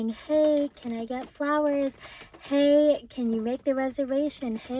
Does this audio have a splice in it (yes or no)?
no